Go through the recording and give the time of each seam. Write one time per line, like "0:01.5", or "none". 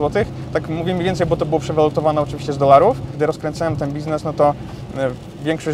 0:03.1